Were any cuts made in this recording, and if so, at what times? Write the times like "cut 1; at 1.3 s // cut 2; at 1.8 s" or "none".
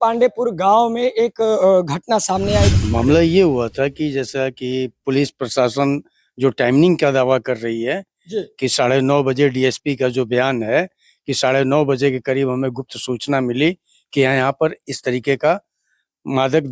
cut 1; at 2.8 s